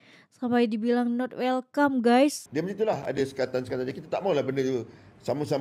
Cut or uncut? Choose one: cut